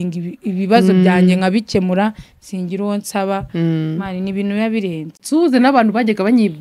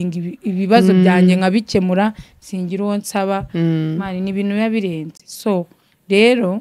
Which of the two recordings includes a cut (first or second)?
first